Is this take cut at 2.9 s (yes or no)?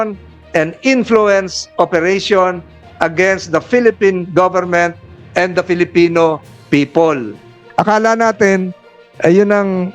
no